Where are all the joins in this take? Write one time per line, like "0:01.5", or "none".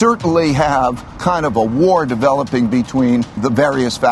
0:01.2
0:03.4